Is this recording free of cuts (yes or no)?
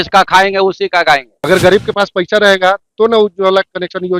no